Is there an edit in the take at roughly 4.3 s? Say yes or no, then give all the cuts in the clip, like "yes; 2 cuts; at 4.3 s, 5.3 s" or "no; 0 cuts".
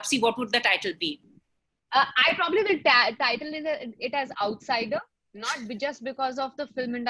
no; 1 cut; at 1.3 s